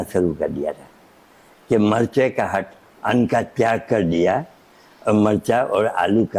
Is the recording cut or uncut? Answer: uncut